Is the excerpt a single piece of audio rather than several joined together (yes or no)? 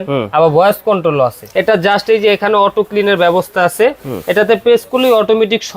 no